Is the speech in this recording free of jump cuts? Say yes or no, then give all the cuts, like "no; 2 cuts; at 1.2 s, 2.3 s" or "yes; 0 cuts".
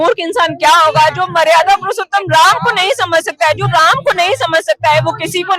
yes; 0 cuts